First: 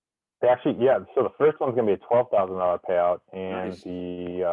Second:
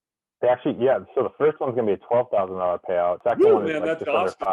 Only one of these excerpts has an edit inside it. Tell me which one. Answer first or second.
second